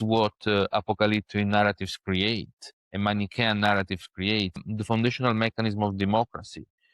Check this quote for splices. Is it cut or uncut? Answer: cut